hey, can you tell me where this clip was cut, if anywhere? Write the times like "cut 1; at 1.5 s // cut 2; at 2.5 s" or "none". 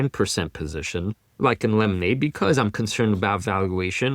cut 1; at 1.2 s